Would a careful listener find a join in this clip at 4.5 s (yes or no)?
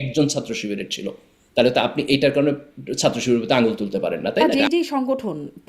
yes